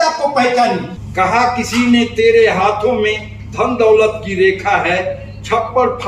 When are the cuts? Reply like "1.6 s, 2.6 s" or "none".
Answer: 1.0 s